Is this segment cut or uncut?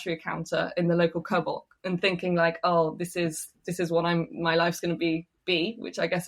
uncut